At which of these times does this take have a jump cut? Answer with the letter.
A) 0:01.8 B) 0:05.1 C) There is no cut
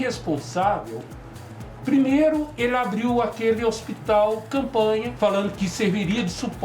B